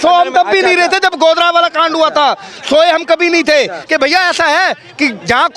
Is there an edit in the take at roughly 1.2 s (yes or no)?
no